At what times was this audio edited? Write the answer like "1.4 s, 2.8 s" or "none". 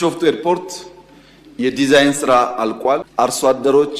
3.1 s